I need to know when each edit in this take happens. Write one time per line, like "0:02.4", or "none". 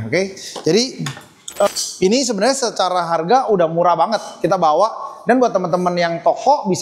0:01.7